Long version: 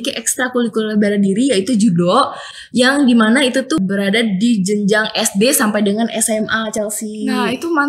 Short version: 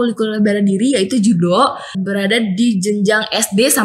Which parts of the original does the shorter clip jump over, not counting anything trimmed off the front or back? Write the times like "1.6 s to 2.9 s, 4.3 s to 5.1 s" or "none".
2.5 s to 3.8 s